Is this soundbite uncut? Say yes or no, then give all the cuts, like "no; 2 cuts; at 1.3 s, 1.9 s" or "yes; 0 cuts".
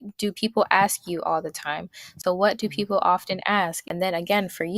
no; 2 cuts; at 2.1 s, 3.8 s